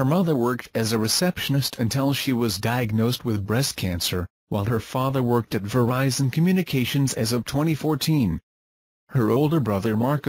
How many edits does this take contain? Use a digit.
1